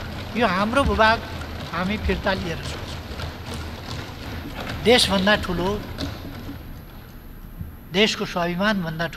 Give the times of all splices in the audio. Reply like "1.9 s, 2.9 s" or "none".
4.3 s